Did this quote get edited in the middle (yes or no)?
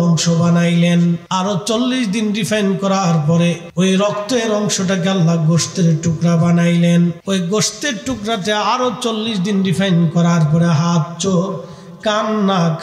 yes